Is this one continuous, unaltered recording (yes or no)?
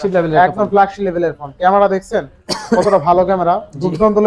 yes